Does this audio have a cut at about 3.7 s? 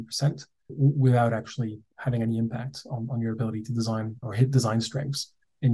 no; 0 cuts

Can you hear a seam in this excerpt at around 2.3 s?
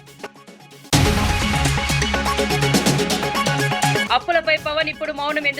no; 2 cuts; at 0.9 s, 3.9 s

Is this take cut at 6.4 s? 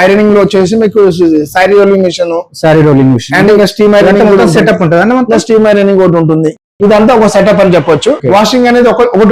no; 1 cut; at 8.2 s

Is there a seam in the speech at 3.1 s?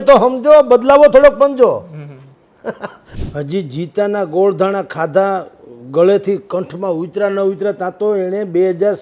yes; 1 cut; at 3.1 s

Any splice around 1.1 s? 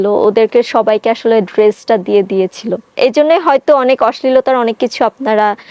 no; 1 cut; at 2.9 s

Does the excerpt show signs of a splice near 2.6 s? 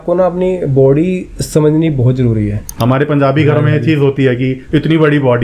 yes; 1 cut; at 2.6 s

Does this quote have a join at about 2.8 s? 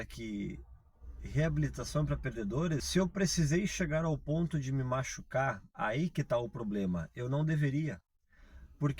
yes; 1 cut; at 2.8 s

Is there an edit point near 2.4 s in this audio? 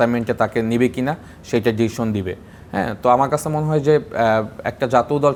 no; 0 cuts

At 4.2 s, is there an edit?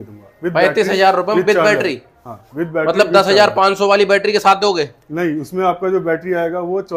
no; 0 cuts

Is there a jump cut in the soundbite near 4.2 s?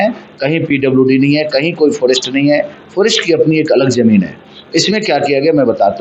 no; 0 cuts

